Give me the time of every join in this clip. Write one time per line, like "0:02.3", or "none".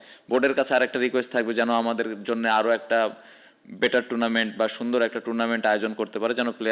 none